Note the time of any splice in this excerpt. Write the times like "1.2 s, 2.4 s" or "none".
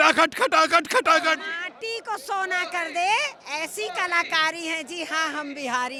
none